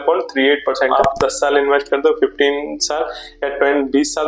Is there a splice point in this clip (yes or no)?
yes